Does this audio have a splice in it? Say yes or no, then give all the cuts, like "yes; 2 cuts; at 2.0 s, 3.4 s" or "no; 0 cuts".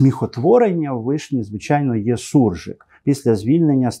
yes; 1 cut; at 2.9 s